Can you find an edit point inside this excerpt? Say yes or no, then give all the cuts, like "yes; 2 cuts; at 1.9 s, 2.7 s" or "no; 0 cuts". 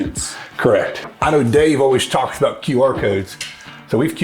yes; 1 cut; at 1.0 s